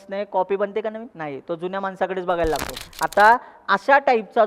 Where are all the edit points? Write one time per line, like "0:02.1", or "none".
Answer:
0:01.1
0:02.8

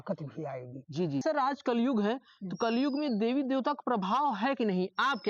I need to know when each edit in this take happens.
0:01.2

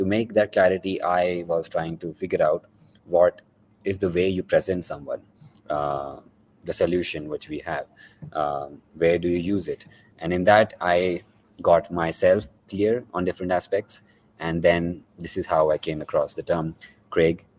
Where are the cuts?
none

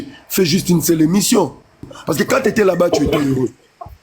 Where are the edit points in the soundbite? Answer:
0:02.0

